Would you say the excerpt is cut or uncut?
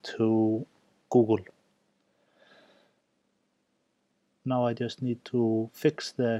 uncut